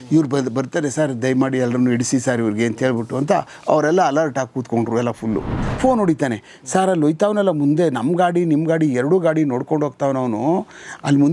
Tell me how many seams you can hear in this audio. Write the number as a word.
one